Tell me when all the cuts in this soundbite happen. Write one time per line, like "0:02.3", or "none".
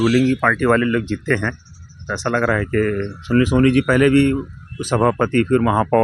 none